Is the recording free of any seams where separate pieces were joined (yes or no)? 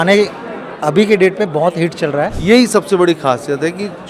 no